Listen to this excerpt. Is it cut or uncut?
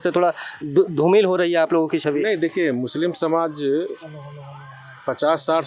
uncut